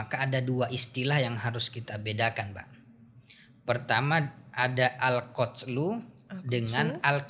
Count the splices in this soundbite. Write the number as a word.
zero